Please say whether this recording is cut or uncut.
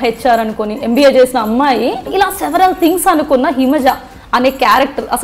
cut